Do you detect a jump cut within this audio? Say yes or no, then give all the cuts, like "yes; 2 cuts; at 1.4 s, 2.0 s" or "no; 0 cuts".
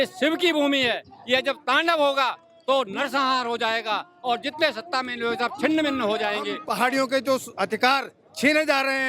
yes; 1 cut; at 6.6 s